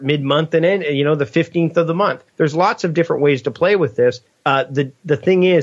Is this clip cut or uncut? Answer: cut